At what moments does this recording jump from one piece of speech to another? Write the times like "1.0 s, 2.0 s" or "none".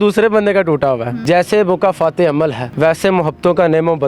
1.1 s, 2.6 s